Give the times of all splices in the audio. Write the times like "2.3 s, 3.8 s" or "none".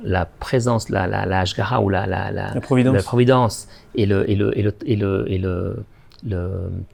none